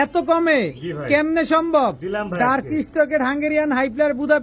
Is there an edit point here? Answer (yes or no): no